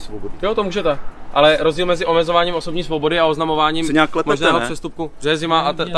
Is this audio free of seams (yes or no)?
yes